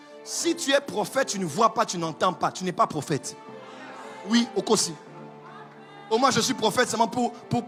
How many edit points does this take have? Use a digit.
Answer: 0